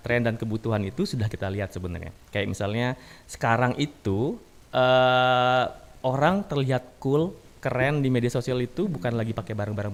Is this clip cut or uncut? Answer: uncut